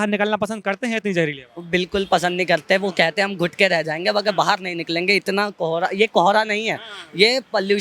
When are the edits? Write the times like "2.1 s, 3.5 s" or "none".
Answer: none